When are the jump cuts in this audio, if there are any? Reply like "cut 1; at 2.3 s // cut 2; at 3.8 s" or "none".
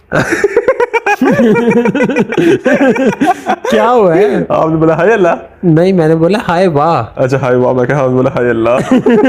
none